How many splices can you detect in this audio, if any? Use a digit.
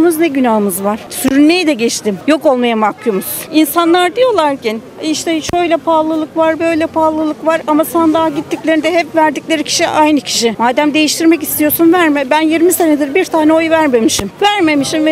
2